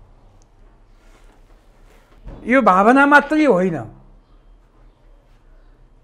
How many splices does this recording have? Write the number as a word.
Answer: one